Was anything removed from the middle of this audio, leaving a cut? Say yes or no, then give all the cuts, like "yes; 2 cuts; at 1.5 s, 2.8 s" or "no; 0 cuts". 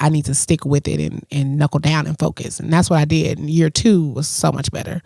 no; 0 cuts